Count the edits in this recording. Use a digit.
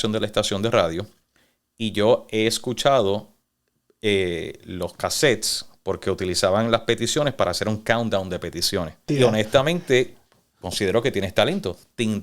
1